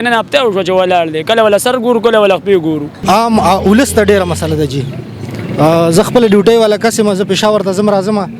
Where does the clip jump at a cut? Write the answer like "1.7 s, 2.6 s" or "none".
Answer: 2.9 s